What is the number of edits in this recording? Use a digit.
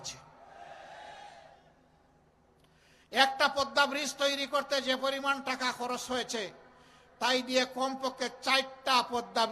0